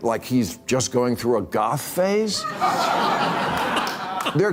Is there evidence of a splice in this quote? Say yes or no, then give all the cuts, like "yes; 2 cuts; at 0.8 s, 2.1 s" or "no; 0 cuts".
no; 0 cuts